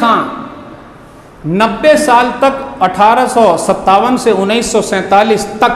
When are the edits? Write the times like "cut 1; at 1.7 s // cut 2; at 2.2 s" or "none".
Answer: none

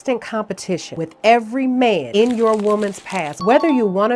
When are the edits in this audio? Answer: none

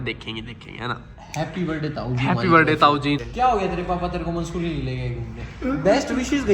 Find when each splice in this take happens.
cut 1; at 3.3 s

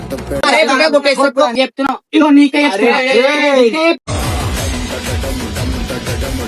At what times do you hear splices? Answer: cut 1; at 1.5 s

